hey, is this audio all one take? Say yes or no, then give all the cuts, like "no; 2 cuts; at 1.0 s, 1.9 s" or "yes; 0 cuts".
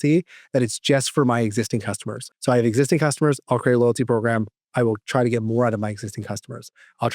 no; 1 cut; at 2.3 s